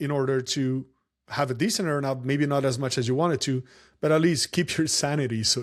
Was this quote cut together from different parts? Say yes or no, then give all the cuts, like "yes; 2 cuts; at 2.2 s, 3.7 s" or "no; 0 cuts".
no; 0 cuts